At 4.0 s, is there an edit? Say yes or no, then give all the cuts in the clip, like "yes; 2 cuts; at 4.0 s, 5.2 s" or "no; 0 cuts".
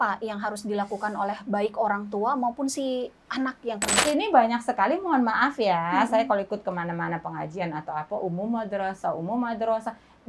yes; 1 cut; at 4.0 s